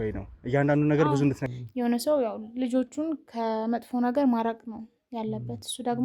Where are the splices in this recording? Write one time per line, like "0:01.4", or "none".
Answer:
0:01.5